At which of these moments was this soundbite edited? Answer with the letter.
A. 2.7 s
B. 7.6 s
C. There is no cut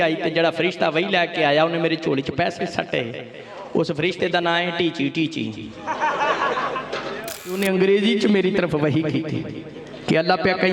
B